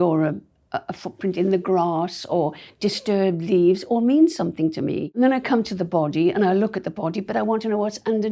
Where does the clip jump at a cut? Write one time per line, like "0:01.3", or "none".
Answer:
0:05.1